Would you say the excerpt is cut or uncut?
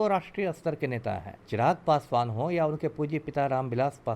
cut